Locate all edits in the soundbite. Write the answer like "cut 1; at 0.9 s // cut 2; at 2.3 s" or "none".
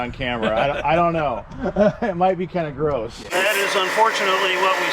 cut 1; at 3.3 s